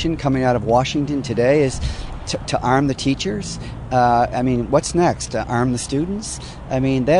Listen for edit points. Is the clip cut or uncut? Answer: uncut